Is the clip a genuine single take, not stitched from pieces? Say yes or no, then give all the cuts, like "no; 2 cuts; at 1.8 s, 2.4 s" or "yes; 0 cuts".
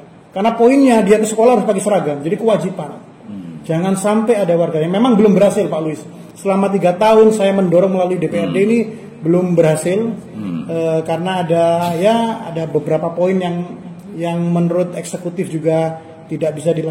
yes; 0 cuts